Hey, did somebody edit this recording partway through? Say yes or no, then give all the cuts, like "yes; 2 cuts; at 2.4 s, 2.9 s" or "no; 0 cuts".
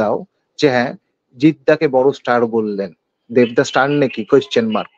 no; 0 cuts